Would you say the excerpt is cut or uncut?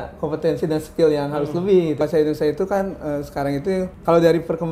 cut